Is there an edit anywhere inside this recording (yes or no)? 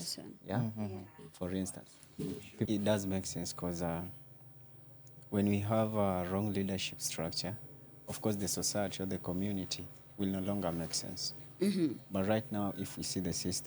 yes